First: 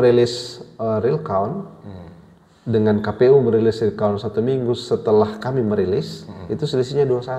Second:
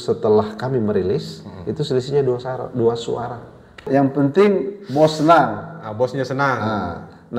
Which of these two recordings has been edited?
second; 1 cut; at 3.8 s

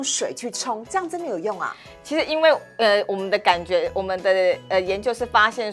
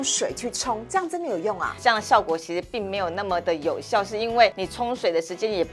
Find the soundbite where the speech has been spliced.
second; 2 cuts; at 1.8 s, 4.6 s

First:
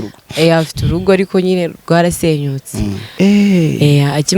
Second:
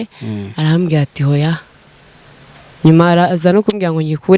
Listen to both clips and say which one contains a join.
first; 1 cut; at 3.0 s

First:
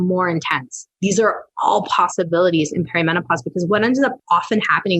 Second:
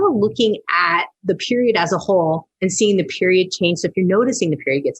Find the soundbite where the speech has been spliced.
first; 2 cuts; at 1.2 s, 4.2 s

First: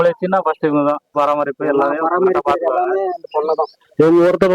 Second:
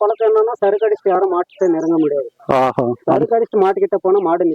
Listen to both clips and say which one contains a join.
first; 1 cut; at 1.3 s

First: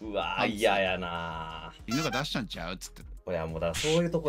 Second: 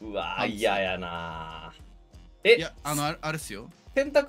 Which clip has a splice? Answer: first; 1 cut; at 1.8 s

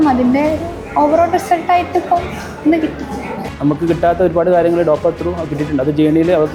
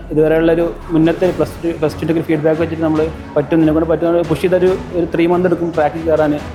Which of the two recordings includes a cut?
first; 1 cut; at 3.4 s

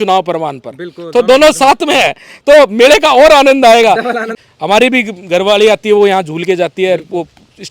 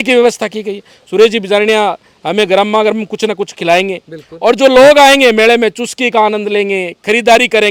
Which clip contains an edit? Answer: first; 1 cut; at 4.3 s

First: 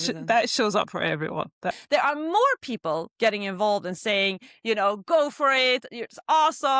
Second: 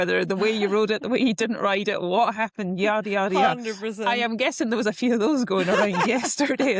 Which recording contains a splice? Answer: first; 1 cut; at 1.8 s

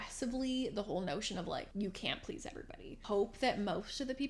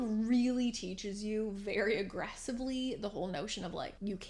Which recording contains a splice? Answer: first; 1 cut; at 3.0 s

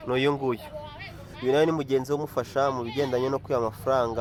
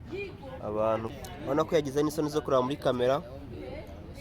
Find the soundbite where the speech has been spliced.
second; 1 cut; at 1.1 s

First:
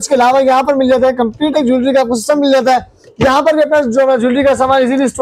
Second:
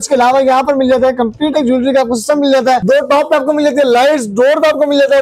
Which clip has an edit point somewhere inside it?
second; 1 cut; at 2.8 s

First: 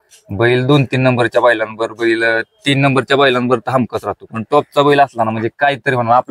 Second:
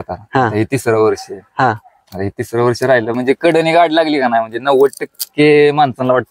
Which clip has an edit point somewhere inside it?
second; 1 cut; at 3.1 s

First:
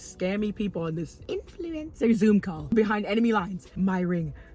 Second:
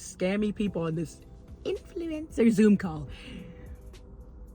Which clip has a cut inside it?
first; 3 cuts; at 1.2 s, 2.7 s, 3.6 s

